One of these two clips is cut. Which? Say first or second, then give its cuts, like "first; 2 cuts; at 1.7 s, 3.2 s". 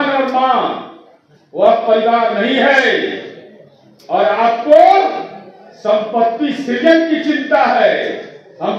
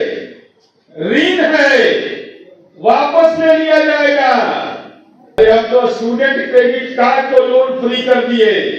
second; 1 cut; at 5.4 s